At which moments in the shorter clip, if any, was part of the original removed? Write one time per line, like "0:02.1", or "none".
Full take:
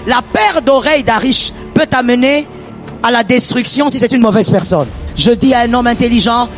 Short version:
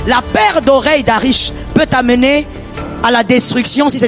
none